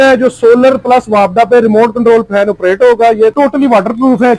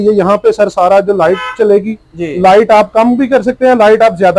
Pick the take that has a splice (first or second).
first